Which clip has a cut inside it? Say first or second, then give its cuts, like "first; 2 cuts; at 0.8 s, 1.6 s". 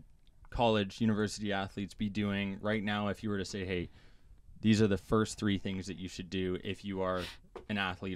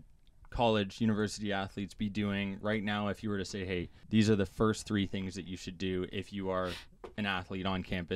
second; 1 cut; at 4.0 s